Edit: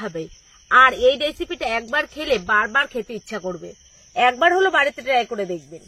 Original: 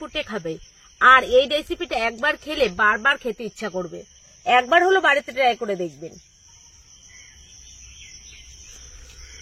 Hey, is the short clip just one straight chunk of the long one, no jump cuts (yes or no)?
yes